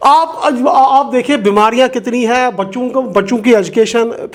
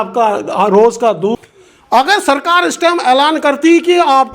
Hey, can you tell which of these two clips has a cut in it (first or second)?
second